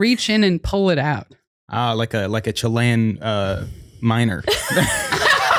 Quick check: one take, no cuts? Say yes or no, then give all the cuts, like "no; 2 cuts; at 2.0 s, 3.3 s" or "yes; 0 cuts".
yes; 0 cuts